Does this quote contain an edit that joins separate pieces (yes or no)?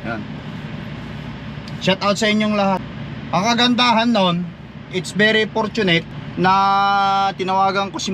yes